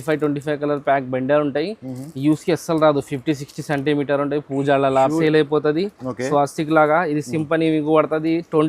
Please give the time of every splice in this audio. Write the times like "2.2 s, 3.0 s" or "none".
5.2 s